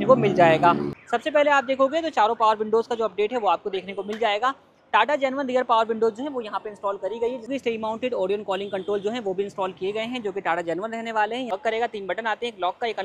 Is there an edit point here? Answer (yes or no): yes